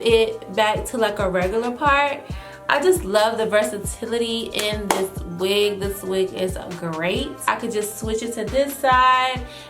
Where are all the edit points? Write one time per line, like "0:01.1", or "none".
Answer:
0:07.3